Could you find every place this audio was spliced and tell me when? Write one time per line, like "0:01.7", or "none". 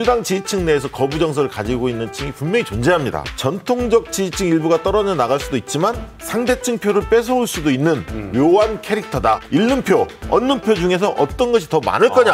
0:03.2
0:06.1
0:09.4